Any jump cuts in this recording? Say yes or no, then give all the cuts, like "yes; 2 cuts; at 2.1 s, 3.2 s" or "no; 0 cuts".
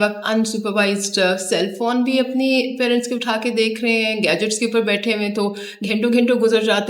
no; 0 cuts